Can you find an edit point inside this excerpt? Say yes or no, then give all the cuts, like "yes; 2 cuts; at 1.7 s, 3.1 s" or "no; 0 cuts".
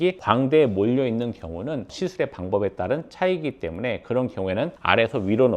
yes; 1 cut; at 1.9 s